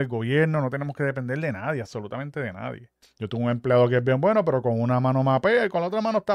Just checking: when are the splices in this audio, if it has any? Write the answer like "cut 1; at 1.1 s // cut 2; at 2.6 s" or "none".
cut 1; at 3.0 s

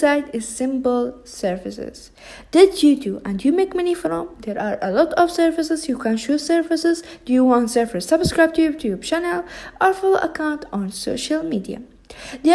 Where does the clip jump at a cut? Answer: none

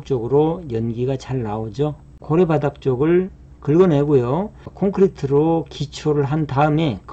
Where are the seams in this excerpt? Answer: cut 1; at 2.1 s // cut 2; at 4.6 s

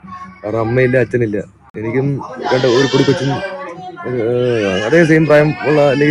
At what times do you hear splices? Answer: none

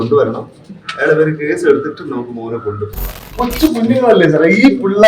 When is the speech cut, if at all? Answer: cut 1; at 3.3 s

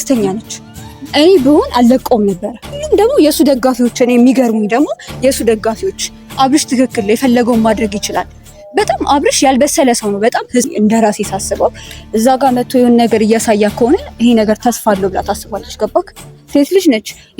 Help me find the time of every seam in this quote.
cut 1; at 2.8 s // cut 2; at 10.7 s

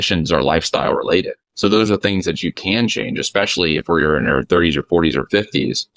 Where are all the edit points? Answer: cut 1; at 1.4 s

